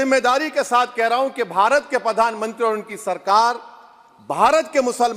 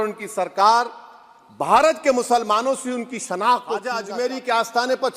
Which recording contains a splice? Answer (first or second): second